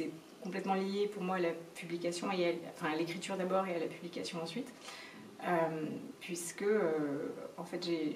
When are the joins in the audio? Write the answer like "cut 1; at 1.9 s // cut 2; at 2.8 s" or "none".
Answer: none